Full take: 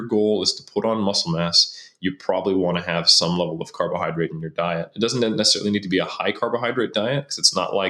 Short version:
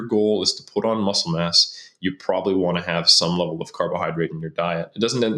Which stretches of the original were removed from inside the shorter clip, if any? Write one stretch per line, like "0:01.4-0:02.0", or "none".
none